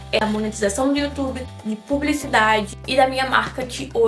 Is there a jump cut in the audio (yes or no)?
no